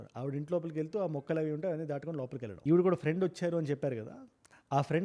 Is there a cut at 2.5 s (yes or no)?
yes